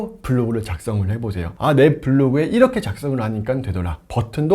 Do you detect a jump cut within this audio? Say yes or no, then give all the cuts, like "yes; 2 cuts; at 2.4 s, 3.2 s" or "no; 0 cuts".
yes; 1 cut; at 1.4 s